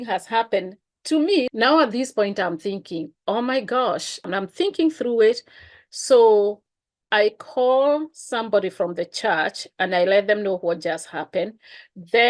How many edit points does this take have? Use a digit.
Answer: 2